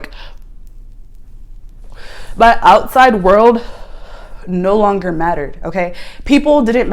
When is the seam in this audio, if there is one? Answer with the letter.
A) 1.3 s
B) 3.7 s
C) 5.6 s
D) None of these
D